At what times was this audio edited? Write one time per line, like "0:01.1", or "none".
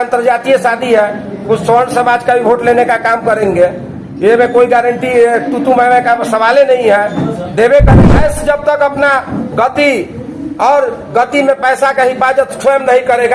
0:07.9